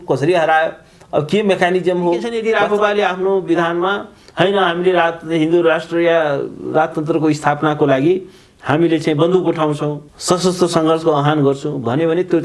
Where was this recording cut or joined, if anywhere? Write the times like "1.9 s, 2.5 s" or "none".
2.3 s, 10.1 s